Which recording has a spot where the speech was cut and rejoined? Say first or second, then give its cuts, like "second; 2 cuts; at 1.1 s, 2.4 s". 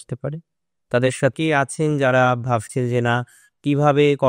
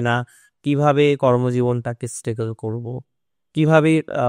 first; 1 cut; at 1.3 s